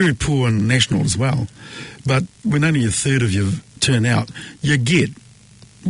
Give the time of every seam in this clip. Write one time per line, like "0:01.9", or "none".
0:02.4
0:03.7